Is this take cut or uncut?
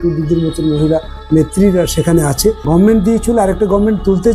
cut